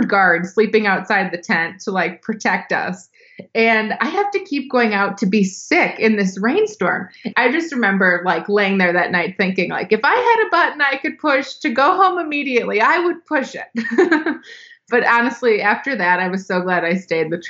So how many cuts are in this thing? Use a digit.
2